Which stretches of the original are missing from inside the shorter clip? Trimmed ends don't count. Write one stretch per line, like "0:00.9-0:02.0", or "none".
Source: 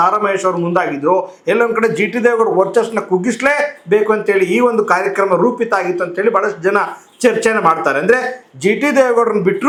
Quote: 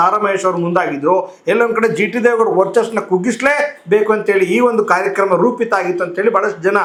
none